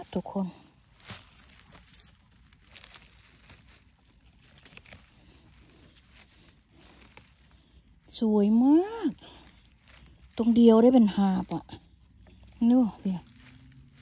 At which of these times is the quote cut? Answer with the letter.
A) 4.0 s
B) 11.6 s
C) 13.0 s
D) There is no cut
D